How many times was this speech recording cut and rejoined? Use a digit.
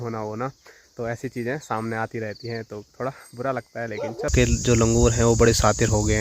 1